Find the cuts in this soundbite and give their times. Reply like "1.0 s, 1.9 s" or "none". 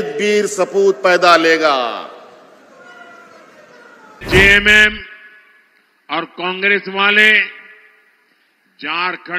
4.2 s